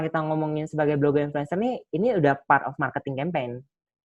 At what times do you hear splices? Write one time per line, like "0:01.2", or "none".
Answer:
none

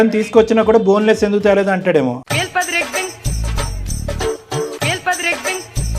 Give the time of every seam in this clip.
none

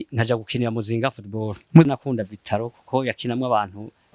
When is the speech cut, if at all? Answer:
0:01.9

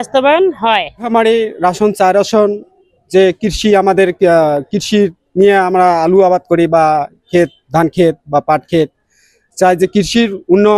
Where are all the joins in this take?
none

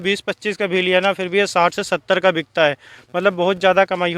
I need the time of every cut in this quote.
none

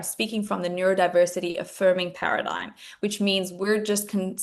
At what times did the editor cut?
none

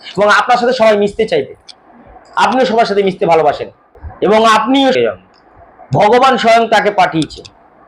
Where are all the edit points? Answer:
0:05.0

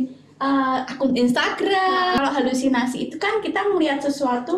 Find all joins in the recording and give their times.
0:02.2

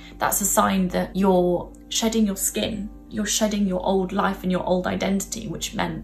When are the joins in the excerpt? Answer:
0:01.1
0:03.0

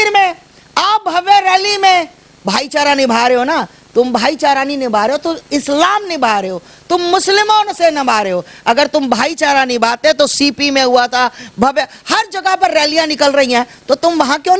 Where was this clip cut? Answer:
none

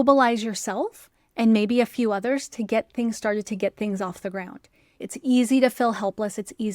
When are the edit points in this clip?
0:05.0

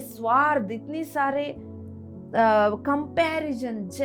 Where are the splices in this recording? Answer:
none

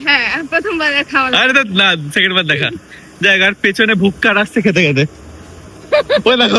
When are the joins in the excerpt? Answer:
none

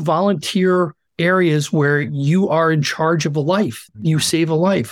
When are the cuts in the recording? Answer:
0:01.0
0:03.9

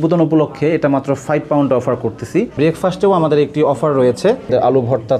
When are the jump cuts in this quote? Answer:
0:02.5
0:04.5

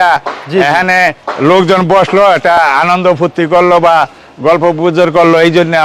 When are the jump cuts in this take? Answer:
none

